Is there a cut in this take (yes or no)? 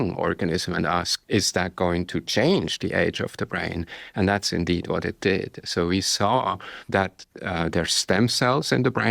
yes